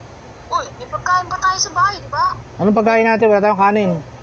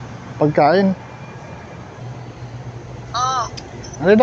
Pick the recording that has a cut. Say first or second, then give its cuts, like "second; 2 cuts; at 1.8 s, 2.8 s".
second; 1 cut; at 2.0 s